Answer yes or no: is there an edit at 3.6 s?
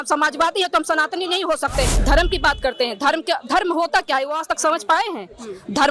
no